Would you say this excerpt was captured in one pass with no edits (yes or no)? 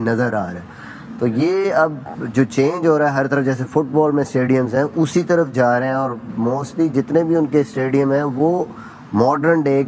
yes